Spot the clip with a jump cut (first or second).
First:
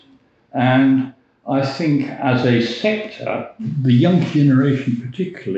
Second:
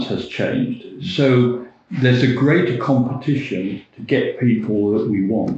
first